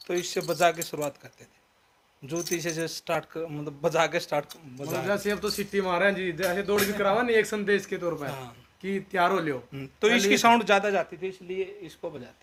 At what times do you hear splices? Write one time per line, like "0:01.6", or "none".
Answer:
none

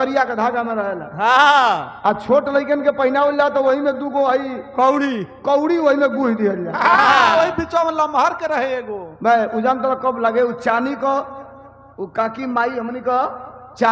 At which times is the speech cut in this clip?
none

